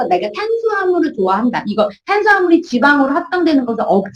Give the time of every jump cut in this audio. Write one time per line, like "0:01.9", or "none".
none